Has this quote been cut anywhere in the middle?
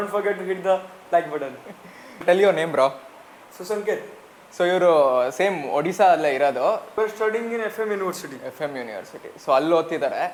no; 0 cuts

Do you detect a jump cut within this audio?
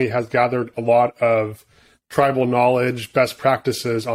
no; 0 cuts

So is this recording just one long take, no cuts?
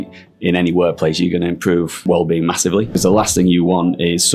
no; 2 cuts; at 2.0 s, 3.0 s

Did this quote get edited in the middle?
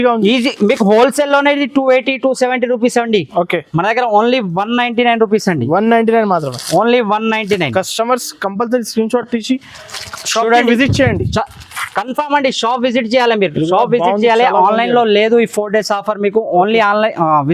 no; 0 cuts

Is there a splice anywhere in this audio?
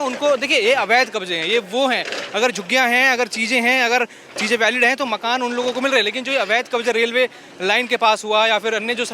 no; 0 cuts

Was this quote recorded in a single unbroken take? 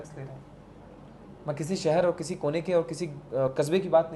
yes; 0 cuts

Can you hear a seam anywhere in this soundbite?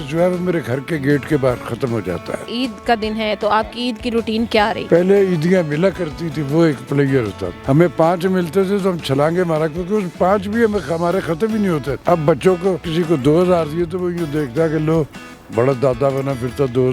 yes; 5 cuts; at 2.4 s, 4.8 s, 7.5 s, 11.9 s, 12.9 s

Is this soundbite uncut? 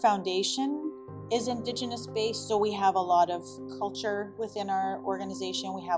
yes; 0 cuts

